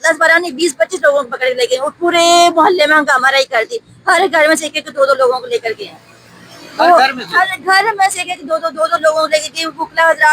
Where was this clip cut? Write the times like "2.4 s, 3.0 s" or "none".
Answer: none